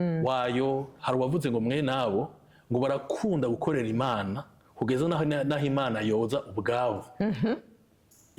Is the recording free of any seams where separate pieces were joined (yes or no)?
no